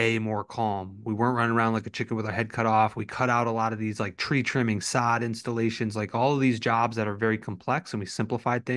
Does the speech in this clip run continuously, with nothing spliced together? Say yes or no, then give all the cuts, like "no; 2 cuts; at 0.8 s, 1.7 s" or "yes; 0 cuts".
yes; 0 cuts